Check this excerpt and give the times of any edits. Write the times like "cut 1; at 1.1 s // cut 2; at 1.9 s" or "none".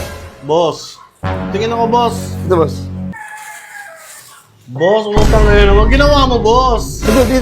cut 1; at 3.1 s